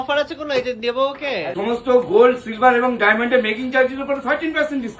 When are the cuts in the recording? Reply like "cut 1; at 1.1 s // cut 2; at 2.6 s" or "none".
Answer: cut 1; at 1.5 s